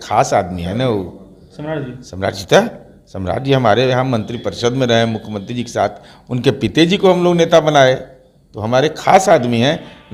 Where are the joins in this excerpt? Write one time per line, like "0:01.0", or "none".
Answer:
none